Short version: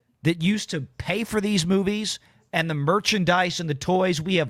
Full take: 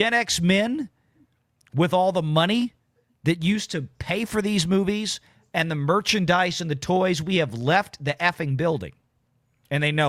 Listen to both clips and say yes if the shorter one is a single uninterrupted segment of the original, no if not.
yes